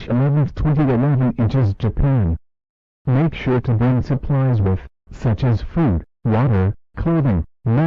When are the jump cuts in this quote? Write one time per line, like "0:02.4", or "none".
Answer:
none